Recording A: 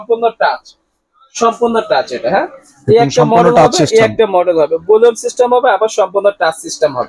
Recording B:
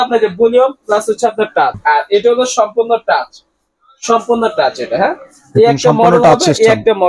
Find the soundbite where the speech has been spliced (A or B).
B